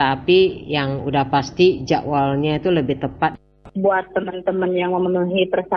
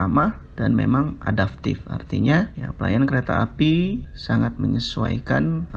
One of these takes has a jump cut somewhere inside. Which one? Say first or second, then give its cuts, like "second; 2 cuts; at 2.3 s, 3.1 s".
first; 1 cut; at 3.5 s